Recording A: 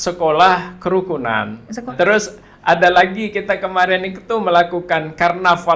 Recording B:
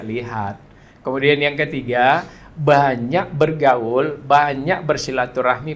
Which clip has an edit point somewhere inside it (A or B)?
A